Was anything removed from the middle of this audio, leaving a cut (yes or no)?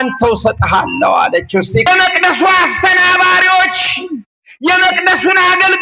yes